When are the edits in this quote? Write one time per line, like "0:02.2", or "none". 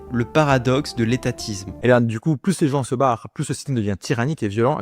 0:01.7

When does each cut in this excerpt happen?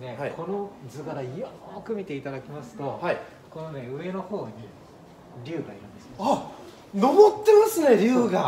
none

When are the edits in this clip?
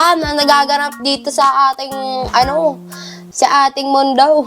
0:00.9

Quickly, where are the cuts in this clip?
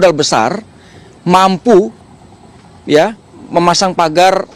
none

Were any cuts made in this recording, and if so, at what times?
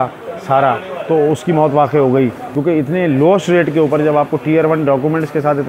0:02.4

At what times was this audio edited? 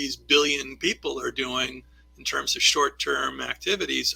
none

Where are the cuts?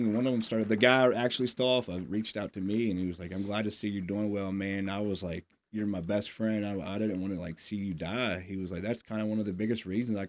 none

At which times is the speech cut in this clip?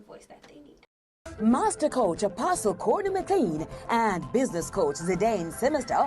0:01.2

